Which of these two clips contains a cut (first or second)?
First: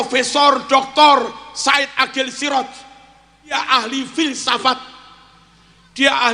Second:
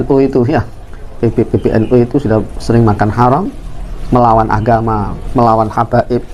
first